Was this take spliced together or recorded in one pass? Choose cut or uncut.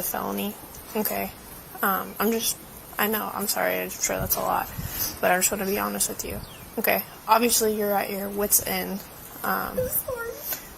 uncut